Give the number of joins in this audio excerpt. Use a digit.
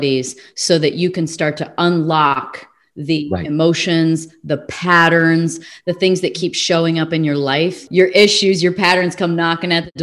1